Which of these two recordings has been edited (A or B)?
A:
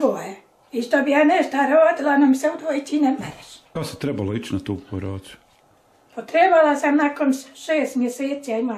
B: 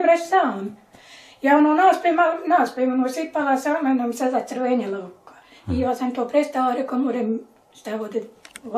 A